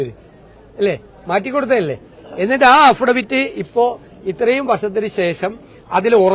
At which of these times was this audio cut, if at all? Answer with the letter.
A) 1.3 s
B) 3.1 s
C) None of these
C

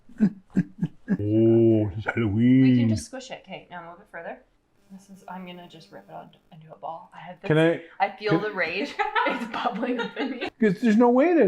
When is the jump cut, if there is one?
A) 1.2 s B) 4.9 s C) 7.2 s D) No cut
A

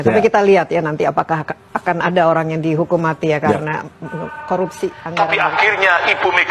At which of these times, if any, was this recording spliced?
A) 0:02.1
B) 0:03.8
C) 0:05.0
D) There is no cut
C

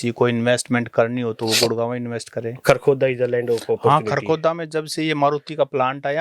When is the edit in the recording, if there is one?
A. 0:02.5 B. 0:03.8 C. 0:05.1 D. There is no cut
A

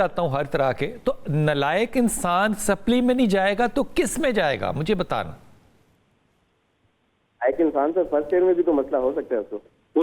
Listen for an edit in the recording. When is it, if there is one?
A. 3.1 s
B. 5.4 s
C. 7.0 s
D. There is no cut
D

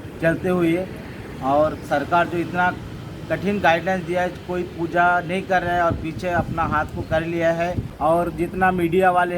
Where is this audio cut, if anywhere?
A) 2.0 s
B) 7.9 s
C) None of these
B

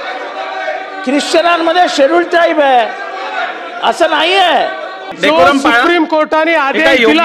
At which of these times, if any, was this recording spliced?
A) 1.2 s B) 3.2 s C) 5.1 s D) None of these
C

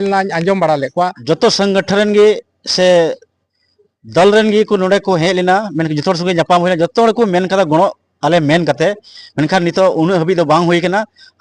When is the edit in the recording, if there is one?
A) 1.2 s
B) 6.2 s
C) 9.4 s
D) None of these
A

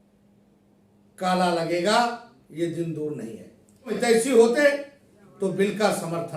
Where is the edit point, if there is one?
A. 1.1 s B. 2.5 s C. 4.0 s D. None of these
C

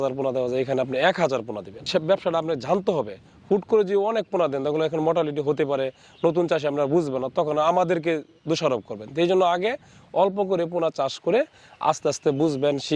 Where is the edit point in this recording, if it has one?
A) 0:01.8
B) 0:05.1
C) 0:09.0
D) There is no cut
A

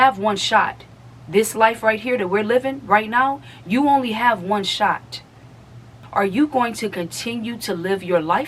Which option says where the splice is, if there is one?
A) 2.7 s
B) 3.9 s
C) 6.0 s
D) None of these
C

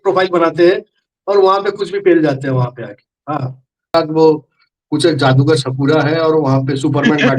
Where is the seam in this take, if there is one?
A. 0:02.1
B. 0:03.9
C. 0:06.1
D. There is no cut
B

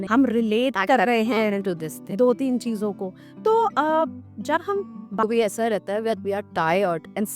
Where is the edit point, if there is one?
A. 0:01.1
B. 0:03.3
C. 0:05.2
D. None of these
C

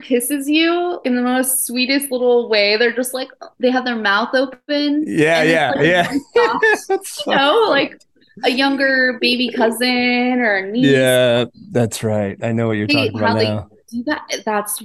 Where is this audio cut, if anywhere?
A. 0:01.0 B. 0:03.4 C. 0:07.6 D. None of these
A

